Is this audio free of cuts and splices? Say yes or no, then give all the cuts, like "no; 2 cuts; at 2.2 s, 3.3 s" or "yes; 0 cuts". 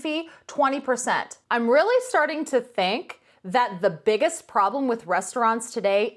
no; 1 cut; at 1.3 s